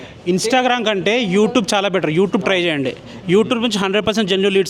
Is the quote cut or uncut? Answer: uncut